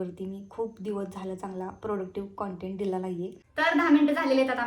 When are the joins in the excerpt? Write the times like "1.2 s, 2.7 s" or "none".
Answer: 3.4 s